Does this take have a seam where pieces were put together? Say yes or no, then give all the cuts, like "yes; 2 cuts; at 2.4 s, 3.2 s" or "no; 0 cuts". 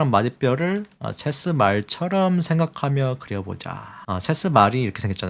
no; 0 cuts